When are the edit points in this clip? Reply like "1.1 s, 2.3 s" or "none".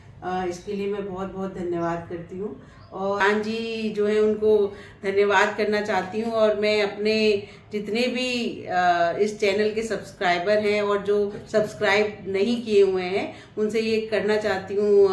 3.2 s